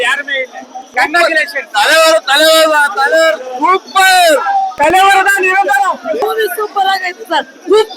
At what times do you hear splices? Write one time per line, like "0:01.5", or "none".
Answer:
0:06.2